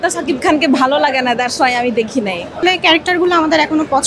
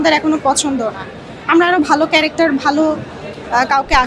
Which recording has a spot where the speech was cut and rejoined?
first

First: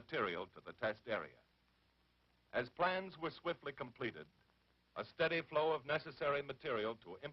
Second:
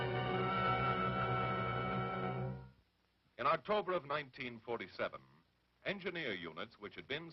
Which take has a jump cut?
first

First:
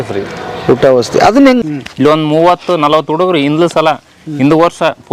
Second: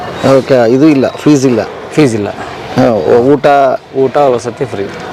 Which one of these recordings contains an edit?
first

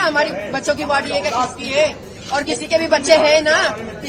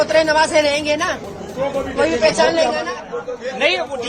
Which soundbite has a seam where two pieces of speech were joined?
second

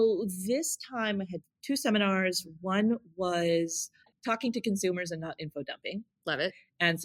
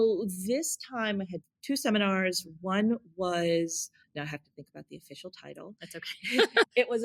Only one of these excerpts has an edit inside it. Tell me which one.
first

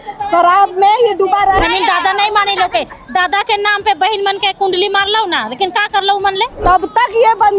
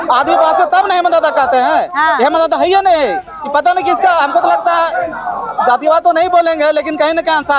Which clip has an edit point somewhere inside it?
first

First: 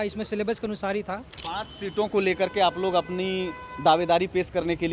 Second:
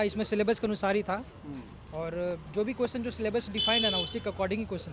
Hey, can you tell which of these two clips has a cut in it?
first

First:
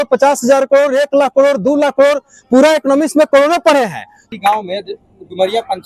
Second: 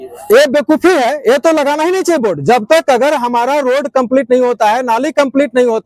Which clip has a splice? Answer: first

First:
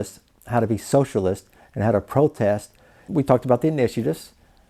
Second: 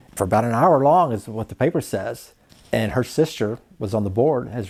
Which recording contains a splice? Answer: first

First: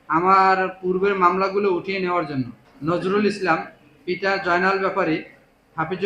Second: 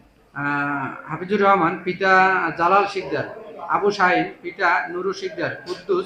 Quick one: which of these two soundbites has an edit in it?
first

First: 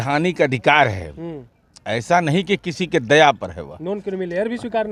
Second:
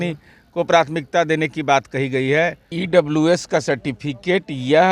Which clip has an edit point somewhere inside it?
second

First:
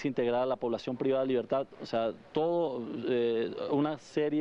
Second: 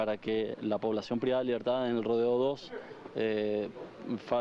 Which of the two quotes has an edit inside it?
second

